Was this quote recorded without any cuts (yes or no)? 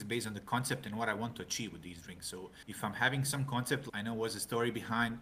no